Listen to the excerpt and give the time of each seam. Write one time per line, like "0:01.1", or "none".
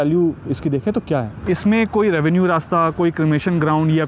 0:01.3